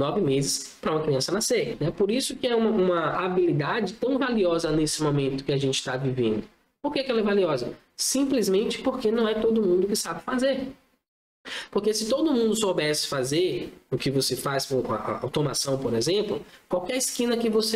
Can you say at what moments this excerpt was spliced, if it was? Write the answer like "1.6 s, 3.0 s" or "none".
1.8 s